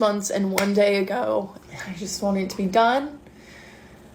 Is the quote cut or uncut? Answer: cut